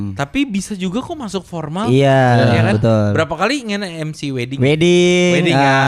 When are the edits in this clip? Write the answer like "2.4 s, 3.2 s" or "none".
none